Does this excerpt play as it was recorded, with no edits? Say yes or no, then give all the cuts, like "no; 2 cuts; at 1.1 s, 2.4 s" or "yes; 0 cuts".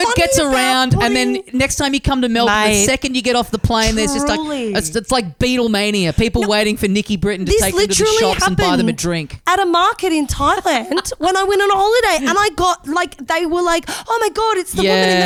yes; 0 cuts